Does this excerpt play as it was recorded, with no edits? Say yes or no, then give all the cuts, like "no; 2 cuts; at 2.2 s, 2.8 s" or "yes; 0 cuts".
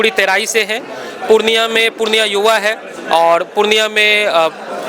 yes; 0 cuts